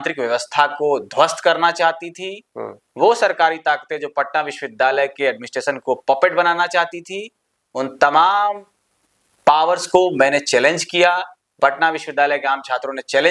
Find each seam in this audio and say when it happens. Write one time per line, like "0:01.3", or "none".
none